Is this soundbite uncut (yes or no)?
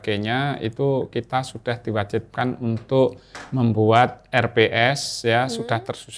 yes